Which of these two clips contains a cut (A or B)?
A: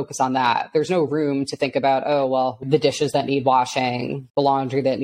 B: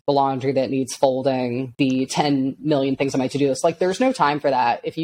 A